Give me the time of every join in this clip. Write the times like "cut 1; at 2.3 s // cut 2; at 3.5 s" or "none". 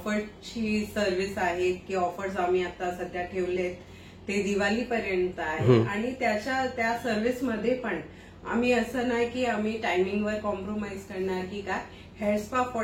none